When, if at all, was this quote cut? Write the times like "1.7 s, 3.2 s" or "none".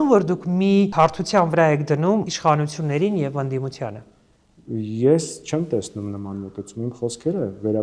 none

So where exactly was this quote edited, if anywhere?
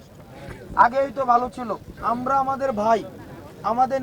1.9 s

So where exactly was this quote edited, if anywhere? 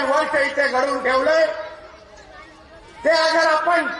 none

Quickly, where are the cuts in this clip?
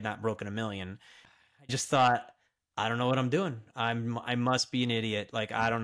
1.4 s

